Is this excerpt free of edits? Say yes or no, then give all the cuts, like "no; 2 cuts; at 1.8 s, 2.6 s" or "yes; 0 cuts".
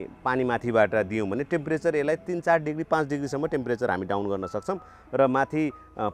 yes; 0 cuts